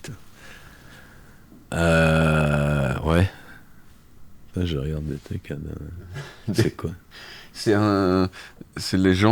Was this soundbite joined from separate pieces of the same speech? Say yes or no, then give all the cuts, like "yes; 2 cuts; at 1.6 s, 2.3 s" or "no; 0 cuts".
no; 0 cuts